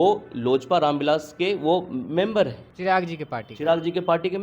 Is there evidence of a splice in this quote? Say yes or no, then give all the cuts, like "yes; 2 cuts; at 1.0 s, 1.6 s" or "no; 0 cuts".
yes; 1 cut; at 2.7 s